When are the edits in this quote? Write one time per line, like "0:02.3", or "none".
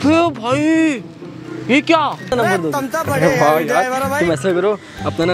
0:02.3